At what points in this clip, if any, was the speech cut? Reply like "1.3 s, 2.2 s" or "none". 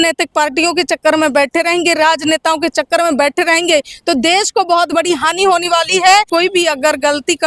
6.3 s

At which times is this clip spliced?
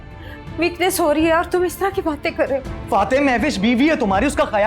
2.7 s

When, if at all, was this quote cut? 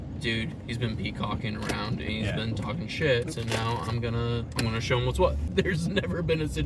3.3 s, 4.5 s, 5.4 s

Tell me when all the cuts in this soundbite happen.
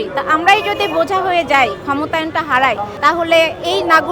2.9 s

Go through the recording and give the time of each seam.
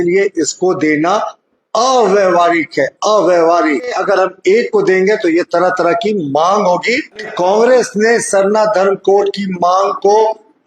4.0 s, 7.3 s

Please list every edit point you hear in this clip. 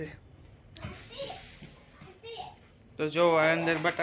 none

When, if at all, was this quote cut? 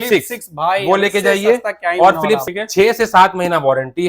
2.4 s

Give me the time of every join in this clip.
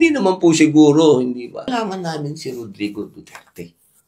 1.7 s

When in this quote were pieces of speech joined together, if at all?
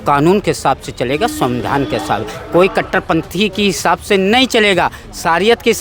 none

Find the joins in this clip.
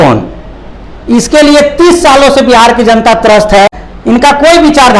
3.8 s

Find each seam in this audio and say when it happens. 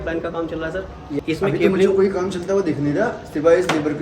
1.2 s

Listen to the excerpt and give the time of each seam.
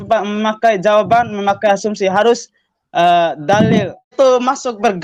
4.1 s

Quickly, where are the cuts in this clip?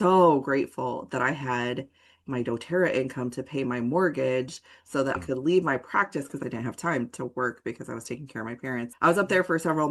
5.2 s, 6.4 s, 8.9 s

